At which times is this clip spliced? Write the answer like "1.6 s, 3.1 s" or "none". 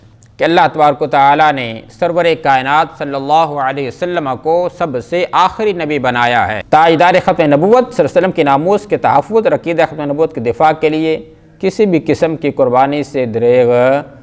6.6 s

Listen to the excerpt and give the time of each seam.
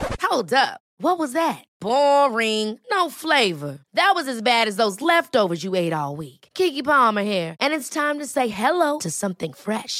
none

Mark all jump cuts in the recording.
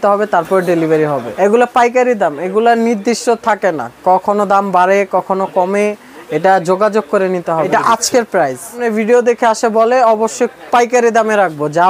1.3 s, 7.7 s, 8.8 s

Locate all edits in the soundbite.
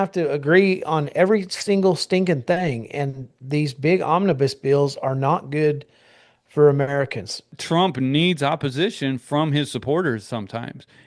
7.5 s

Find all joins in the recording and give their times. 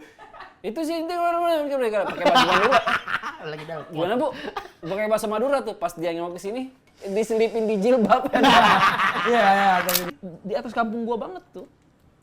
10.2 s

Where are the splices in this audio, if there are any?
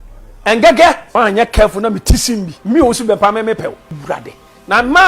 1.0 s, 2.5 s, 3.9 s

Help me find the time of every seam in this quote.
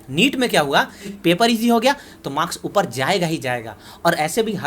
1.1 s

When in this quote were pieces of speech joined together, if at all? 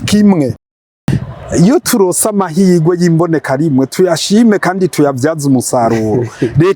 1.0 s

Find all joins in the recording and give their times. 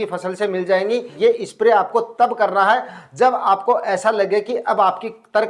1.1 s

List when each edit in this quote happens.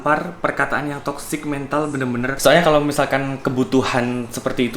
2.4 s

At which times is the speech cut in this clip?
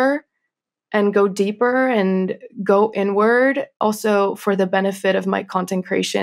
3.7 s

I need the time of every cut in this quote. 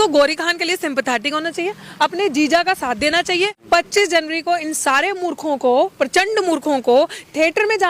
3.6 s

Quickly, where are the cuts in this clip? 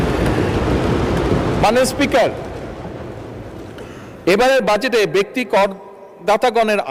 none

